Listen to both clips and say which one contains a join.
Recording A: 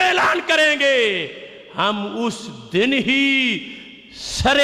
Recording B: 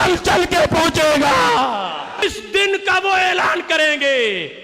B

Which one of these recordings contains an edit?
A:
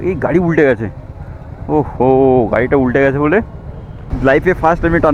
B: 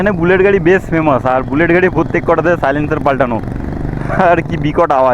A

